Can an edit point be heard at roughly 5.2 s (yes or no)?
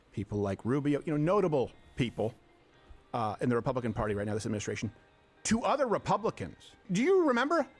no